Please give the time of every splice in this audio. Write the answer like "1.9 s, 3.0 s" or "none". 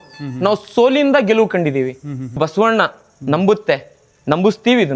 2.4 s